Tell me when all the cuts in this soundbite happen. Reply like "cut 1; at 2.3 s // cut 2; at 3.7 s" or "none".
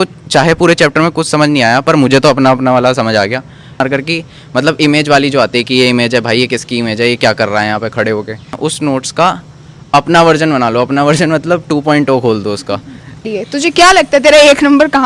cut 1; at 3.8 s // cut 2; at 8.5 s // cut 3; at 13.2 s